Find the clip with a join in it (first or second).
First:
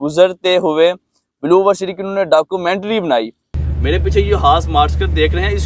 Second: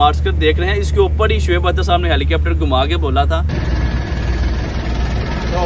first